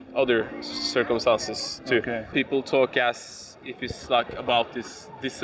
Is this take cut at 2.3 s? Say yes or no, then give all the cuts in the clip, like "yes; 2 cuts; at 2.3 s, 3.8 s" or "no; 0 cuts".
yes; 1 cut; at 2.3 s